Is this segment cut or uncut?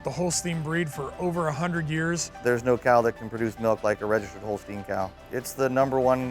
cut